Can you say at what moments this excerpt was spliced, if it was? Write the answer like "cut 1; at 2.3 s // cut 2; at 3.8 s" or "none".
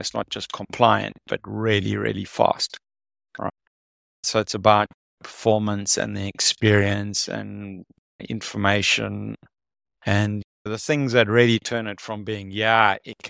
none